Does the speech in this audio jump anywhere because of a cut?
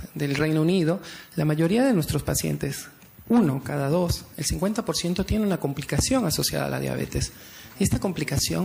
yes; 1 cut; at 4.4 s

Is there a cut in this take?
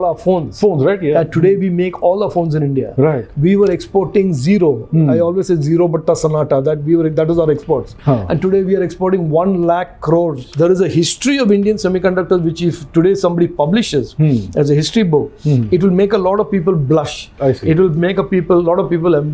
yes; 1 cut; at 10.5 s

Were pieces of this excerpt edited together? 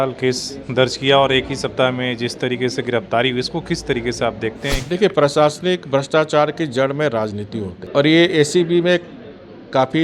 yes; 2 cuts; at 4.8 s, 7.8 s

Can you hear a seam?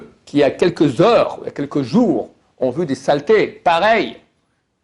no; 0 cuts

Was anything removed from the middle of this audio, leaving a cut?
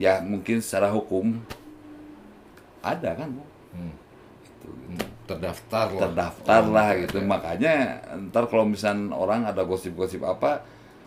no; 0 cuts

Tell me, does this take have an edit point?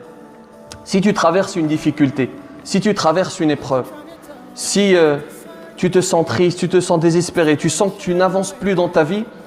no; 0 cuts

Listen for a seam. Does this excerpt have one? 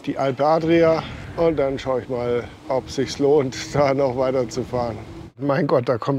yes; 3 cuts; at 1.2 s, 2.5 s, 5.4 s

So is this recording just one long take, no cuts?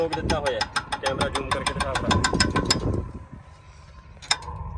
yes; 0 cuts

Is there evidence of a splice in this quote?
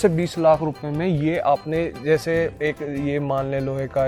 no; 0 cuts

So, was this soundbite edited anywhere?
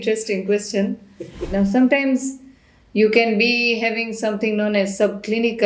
yes; 1 cut; at 1.5 s

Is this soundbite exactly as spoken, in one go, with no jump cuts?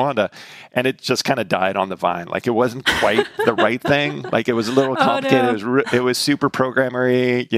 yes; 0 cuts

